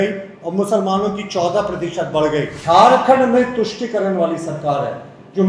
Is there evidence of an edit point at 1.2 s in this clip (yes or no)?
no